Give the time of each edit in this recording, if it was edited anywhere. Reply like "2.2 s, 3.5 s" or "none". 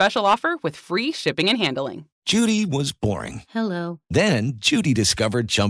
2.1 s